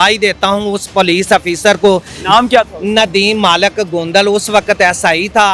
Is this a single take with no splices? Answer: yes; 0 cuts

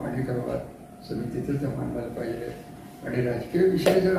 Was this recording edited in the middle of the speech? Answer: no; 0 cuts

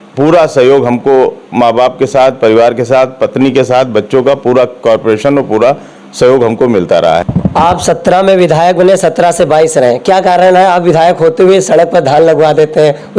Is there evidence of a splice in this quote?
yes; 1 cut; at 7.3 s

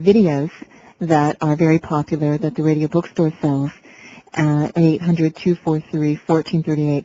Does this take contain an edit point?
yes; 1 cut; at 3.1 s

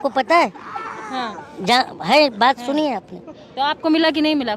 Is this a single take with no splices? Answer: yes; 0 cuts

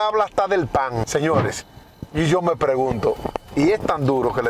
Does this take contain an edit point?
yes; 1 cut; at 1.1 s

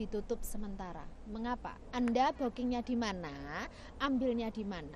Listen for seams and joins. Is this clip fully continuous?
no; 1 cut; at 1.8 s

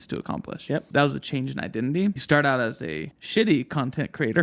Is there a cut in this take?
yes; 3 cuts; at 0.9 s, 2.2 s, 3.1 s

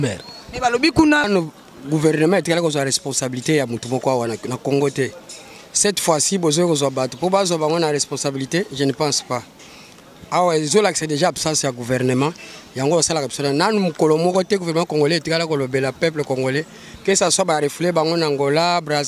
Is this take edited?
yes; 1 cut; at 1.3 s

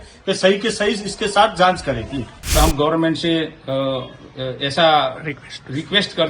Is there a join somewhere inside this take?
yes; 1 cut; at 2.5 s

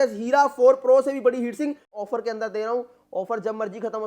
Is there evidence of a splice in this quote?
yes; 1 cut; at 2.0 s

